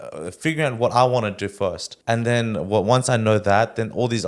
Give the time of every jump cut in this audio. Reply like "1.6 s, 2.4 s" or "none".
1.9 s